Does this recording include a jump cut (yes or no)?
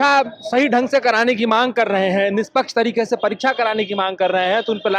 no